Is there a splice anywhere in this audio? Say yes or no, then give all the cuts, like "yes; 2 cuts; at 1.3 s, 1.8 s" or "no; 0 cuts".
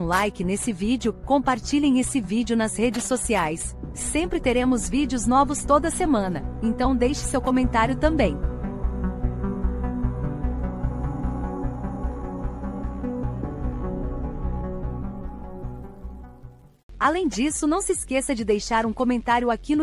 yes; 1 cut; at 16.8 s